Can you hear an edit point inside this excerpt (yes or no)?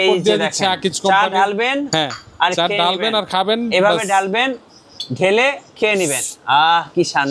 no